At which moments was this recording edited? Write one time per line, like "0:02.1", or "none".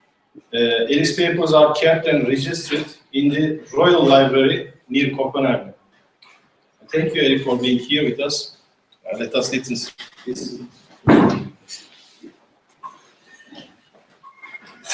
0:09.2